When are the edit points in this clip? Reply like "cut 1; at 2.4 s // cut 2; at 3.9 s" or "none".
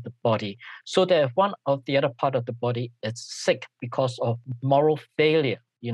cut 1; at 4.5 s